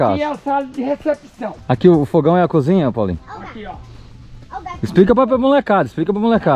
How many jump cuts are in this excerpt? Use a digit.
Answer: 1